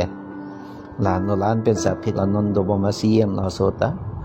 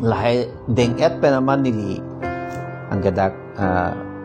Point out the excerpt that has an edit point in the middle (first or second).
first